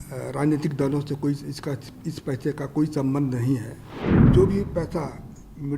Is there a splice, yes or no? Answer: yes